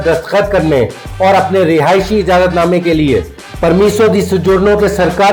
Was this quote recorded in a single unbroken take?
yes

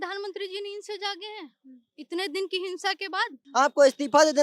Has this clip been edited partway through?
yes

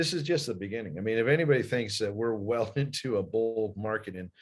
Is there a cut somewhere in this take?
no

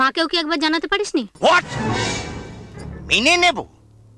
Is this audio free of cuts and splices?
no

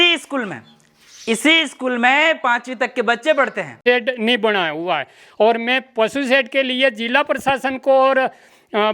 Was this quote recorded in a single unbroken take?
no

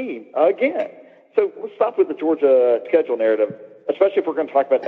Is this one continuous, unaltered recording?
no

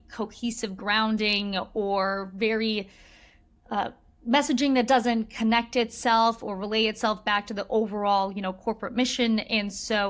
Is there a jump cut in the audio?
no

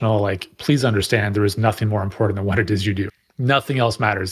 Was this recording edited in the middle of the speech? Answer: yes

